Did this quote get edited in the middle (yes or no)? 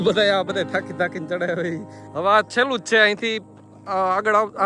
yes